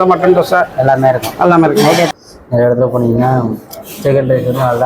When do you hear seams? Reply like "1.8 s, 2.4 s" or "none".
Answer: 2.1 s